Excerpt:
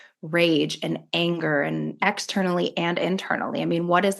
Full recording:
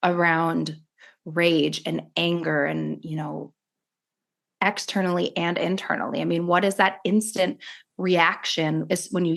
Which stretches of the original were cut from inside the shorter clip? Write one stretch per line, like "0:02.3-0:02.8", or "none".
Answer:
0:03.0-0:04.5